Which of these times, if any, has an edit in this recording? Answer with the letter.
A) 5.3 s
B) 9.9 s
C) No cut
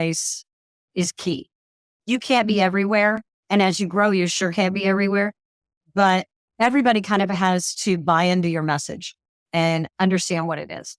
B